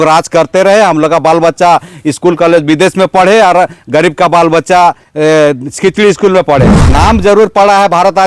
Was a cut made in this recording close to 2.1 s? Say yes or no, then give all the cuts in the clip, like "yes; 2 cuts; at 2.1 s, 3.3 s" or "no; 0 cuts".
no; 1 cut; at 6.8 s